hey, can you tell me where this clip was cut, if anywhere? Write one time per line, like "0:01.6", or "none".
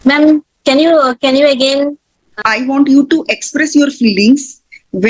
0:02.3

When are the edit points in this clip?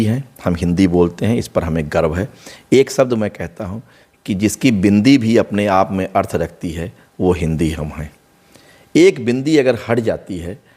none

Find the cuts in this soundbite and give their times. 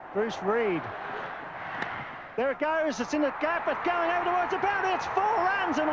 none

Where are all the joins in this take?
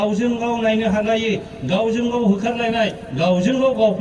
none

